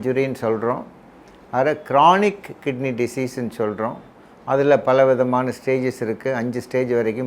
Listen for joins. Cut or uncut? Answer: uncut